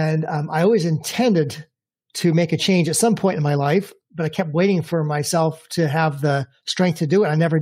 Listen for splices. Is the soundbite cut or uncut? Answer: cut